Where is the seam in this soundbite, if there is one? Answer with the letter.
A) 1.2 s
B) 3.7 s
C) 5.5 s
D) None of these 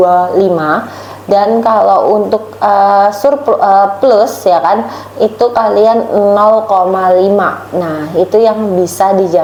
D